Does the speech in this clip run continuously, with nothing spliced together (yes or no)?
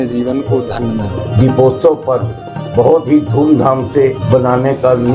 no